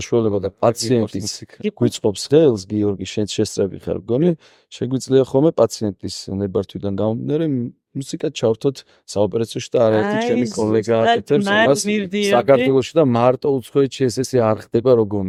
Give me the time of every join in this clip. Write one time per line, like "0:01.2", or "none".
none